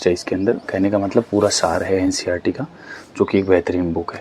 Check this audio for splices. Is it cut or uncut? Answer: uncut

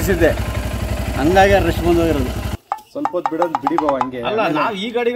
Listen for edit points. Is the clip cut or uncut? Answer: cut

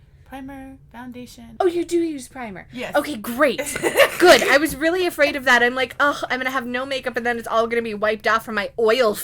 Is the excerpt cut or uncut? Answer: cut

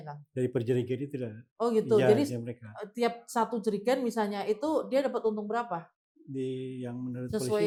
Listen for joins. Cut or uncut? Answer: uncut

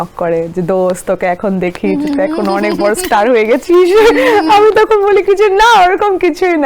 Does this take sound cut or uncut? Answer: uncut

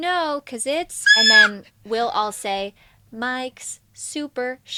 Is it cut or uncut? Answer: uncut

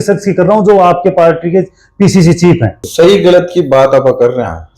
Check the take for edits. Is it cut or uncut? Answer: cut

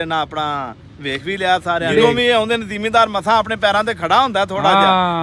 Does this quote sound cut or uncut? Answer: cut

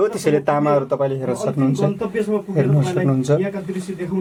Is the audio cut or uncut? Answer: uncut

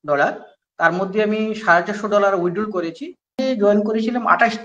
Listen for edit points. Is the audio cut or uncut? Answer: cut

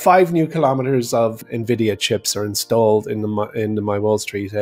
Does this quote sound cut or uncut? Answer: cut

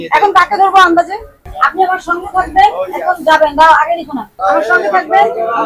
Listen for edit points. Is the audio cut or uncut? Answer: cut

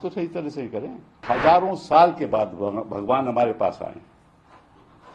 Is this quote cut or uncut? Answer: cut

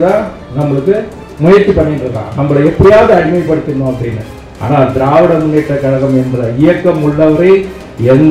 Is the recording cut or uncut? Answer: cut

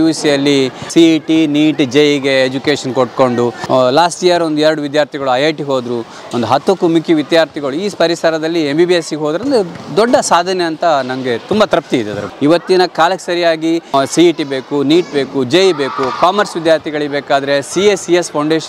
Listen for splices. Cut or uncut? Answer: cut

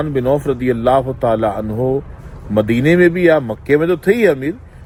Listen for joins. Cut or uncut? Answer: uncut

